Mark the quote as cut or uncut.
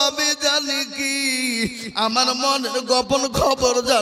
uncut